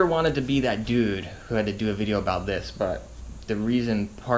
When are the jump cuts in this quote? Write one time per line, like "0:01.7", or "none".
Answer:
none

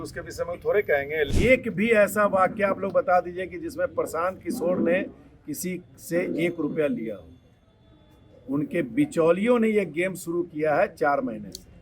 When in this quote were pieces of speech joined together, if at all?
0:01.3

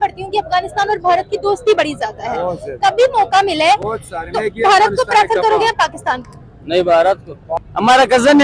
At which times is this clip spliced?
0:07.4

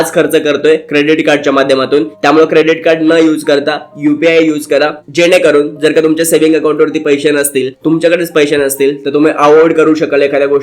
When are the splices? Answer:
none

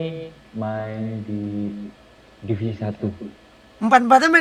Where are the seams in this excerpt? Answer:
none

